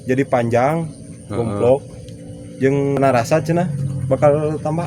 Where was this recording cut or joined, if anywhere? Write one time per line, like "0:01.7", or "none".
0:03.0